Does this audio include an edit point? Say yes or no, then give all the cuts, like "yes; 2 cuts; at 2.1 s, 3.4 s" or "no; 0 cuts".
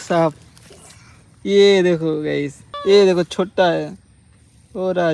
no; 0 cuts